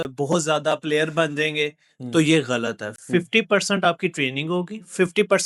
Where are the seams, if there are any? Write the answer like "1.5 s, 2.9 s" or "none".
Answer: none